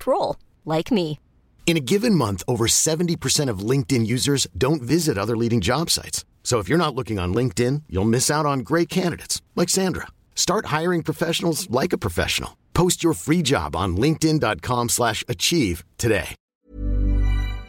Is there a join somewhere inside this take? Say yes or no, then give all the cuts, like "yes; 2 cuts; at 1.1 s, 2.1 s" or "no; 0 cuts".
yes; 1 cut; at 16.5 s